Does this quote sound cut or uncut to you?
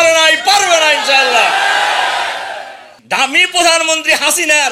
cut